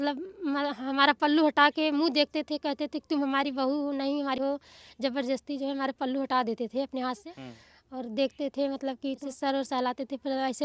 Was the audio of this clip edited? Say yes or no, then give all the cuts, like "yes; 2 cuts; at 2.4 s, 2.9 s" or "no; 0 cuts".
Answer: yes; 3 cuts; at 4.4 s, 7.3 s, 9.2 s